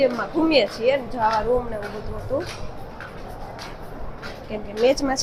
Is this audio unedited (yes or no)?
yes